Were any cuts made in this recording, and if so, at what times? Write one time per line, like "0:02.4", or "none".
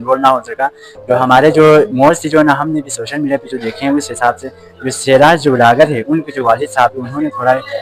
none